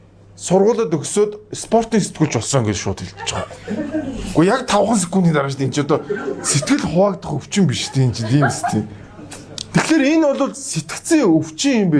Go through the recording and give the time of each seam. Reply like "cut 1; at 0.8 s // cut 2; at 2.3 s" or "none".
none